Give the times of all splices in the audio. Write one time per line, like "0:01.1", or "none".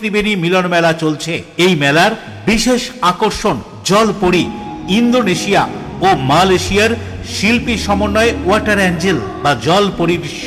none

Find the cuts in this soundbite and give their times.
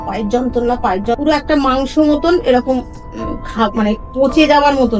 0:01.1

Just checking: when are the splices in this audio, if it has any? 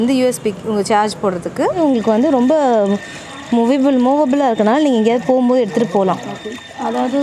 0:01.8

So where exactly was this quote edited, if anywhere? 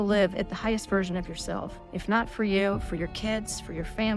0:01.9

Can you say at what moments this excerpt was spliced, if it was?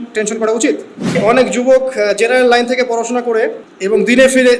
0:01.2
0:03.7

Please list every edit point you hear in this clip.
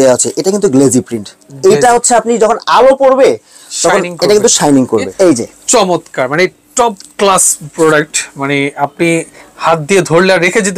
0:05.1
0:07.6

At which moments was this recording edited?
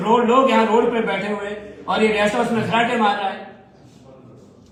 none

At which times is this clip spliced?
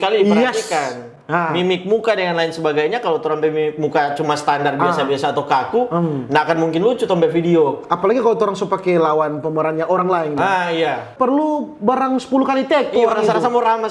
0:11.1

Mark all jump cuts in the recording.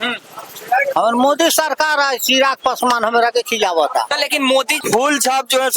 0:04.8

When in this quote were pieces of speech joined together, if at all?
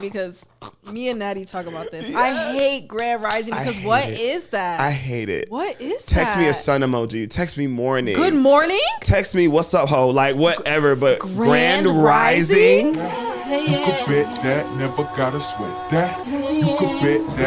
0:13.1

